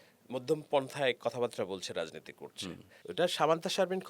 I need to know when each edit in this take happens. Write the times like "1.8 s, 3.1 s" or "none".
2.9 s